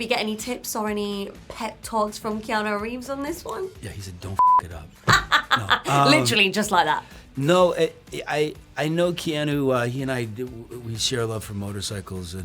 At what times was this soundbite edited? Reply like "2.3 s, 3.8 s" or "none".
none